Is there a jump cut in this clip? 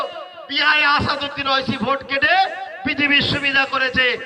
no; 0 cuts

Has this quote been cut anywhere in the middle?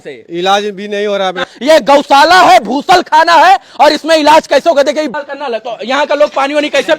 yes; 2 cuts; at 1.5 s, 5.1 s

